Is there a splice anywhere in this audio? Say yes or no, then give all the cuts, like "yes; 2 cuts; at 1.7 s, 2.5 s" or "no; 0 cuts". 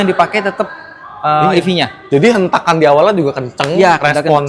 no; 0 cuts